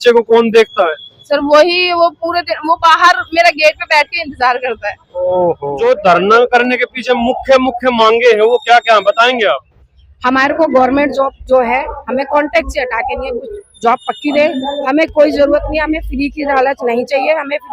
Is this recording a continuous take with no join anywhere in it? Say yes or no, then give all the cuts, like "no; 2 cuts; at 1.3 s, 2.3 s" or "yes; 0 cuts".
no; 1 cut; at 5.7 s